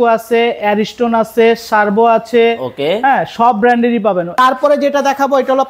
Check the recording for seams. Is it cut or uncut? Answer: cut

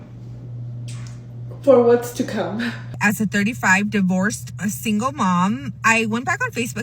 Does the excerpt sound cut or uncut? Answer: cut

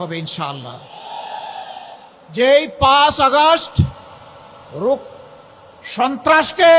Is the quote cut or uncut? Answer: uncut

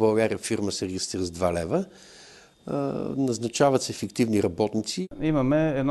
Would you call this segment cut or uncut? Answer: cut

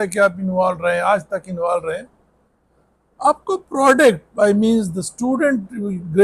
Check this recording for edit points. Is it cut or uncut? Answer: uncut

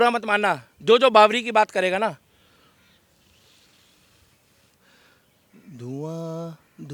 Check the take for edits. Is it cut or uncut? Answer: uncut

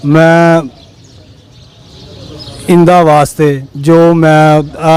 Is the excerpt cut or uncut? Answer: uncut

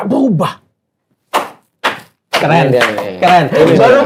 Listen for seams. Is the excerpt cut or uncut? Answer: uncut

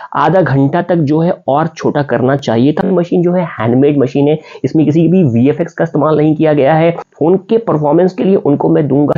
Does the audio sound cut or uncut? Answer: cut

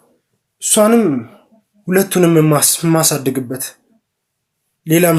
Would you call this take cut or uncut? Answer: uncut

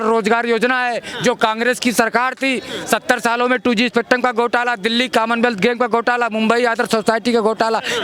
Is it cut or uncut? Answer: uncut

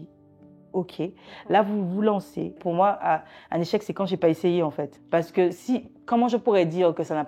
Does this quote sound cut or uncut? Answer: cut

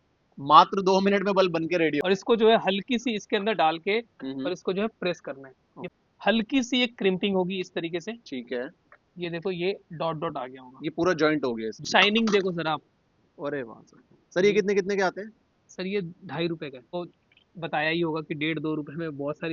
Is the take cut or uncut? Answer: cut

